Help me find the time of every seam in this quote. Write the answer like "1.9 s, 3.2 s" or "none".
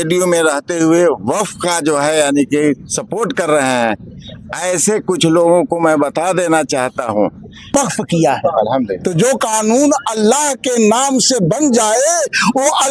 7.7 s